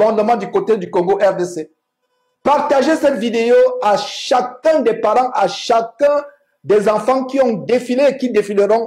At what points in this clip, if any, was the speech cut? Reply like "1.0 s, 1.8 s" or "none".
none